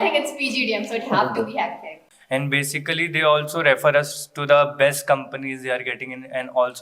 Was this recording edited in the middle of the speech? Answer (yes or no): yes